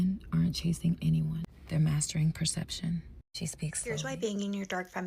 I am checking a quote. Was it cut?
yes; 1 cut; at 4.0 s

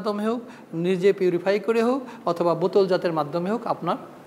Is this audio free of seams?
yes; 0 cuts

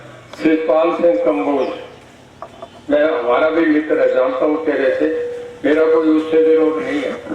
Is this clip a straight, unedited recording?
yes; 0 cuts

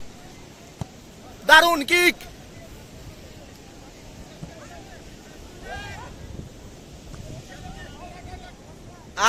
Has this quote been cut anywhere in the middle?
no; 0 cuts

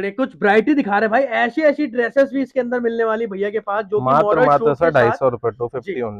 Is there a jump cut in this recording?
no; 0 cuts

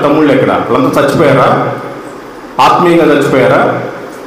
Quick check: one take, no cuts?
yes; 0 cuts

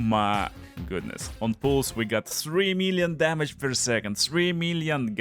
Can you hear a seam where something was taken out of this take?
yes; 1 cut; at 1.2 s

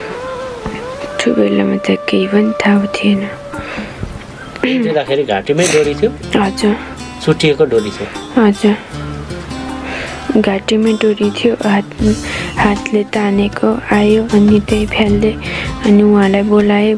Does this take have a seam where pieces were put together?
no; 0 cuts

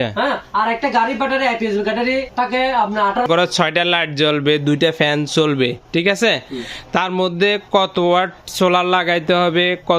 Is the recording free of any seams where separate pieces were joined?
no; 2 cuts; at 2.3 s, 3.2 s

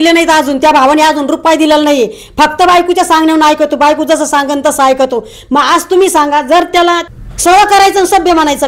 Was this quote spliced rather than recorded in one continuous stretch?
yes; 1 cut; at 7.0 s

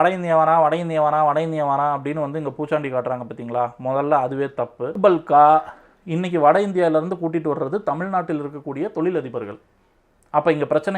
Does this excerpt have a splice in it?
yes; 1 cut; at 4.9 s

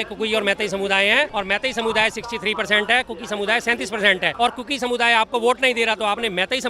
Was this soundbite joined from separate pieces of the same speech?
yes; 2 cuts; at 1.3 s, 4.3 s

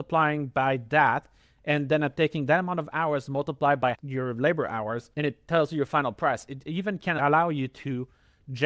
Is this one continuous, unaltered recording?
no; 3 cuts; at 4.0 s, 5.1 s, 7.2 s

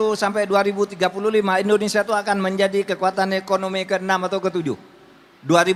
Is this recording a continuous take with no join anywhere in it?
yes; 0 cuts

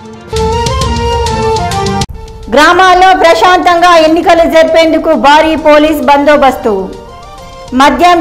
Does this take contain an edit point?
yes; 1 cut; at 2.0 s

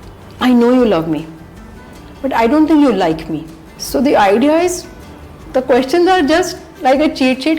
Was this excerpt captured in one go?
no; 1 cut; at 3.8 s

